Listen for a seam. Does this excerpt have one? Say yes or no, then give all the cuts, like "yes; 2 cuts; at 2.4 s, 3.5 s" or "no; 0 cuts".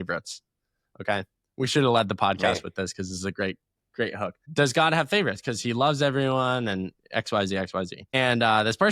no; 0 cuts